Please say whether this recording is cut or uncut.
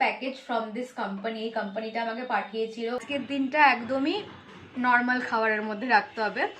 cut